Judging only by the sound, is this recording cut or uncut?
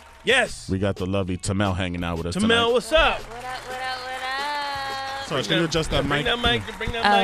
cut